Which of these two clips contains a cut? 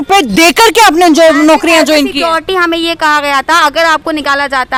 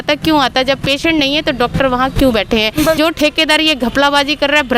second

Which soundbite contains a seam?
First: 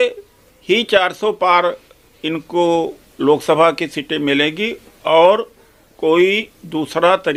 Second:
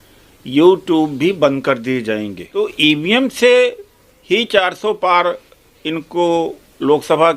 second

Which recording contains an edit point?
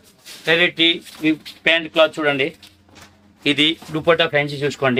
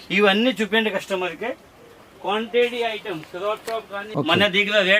second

